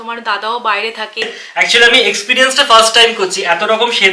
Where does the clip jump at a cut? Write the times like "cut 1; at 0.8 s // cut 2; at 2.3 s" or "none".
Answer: cut 1; at 1.2 s